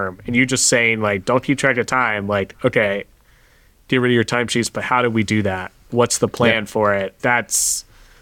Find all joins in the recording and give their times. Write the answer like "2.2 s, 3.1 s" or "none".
5.9 s, 7.2 s